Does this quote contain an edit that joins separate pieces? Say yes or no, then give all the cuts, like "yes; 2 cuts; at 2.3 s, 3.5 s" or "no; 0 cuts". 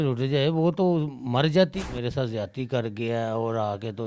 yes; 1 cut; at 1.8 s